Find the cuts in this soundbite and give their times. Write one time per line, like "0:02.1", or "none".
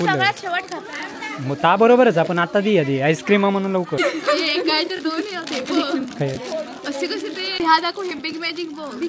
0:04.0
0:07.5